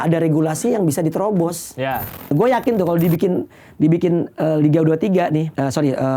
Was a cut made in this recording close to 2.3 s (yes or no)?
yes